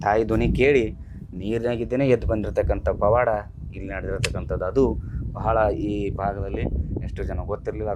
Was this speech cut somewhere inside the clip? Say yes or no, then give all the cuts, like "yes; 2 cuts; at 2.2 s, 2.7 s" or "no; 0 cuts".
no; 0 cuts